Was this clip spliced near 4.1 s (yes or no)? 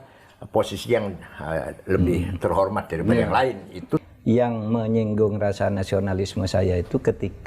yes